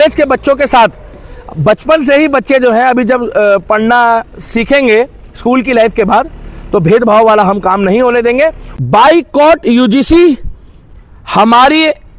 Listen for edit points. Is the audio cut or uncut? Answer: cut